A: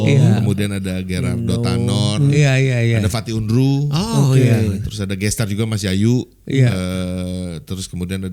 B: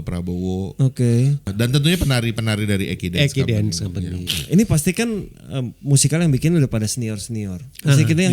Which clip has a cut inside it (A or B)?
B